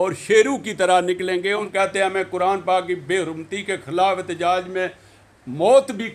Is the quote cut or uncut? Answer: cut